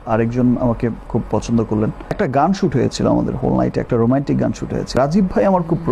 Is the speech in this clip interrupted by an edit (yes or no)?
yes